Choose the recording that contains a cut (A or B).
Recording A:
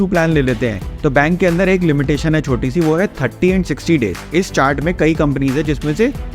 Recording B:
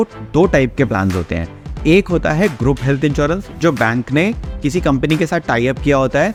A